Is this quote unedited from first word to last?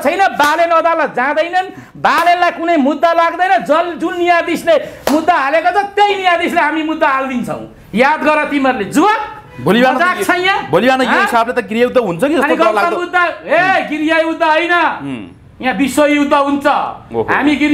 yes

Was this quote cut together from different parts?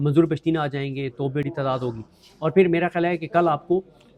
no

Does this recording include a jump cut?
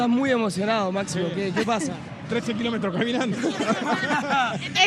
no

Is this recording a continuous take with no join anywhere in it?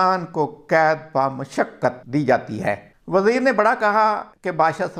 no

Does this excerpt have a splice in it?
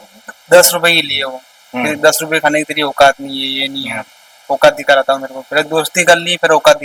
no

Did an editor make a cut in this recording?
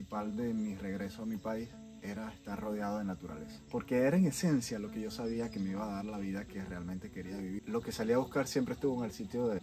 yes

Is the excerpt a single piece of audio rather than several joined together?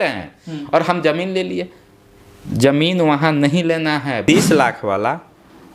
no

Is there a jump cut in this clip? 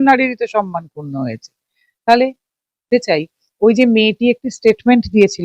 yes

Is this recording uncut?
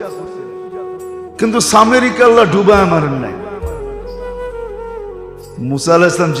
yes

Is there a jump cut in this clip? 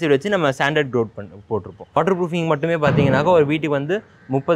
yes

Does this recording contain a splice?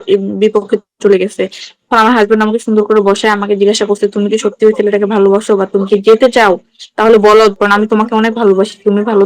no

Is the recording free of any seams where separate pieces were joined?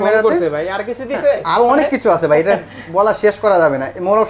yes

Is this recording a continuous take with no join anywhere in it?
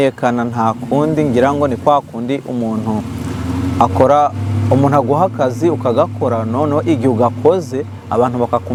yes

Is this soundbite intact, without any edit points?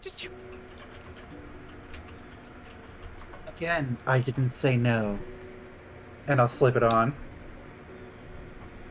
no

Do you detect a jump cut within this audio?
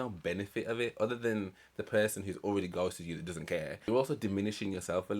yes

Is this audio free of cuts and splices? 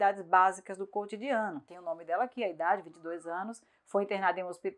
yes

